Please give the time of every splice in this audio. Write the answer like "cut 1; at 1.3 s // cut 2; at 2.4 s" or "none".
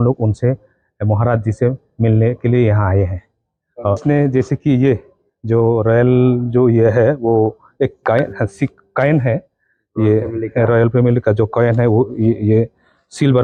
none